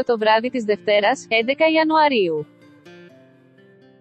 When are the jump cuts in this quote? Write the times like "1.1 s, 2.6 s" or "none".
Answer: 2.4 s